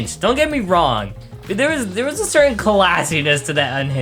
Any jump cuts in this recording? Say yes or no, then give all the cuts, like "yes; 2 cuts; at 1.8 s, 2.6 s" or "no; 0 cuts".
no; 0 cuts